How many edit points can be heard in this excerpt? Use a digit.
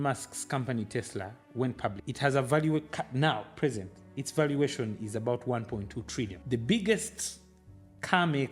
2